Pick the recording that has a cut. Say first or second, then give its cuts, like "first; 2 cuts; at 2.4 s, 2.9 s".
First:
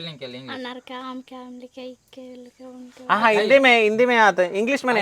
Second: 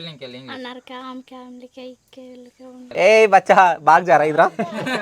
second; 1 cut; at 2.8 s